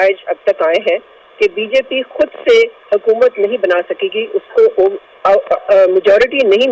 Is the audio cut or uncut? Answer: uncut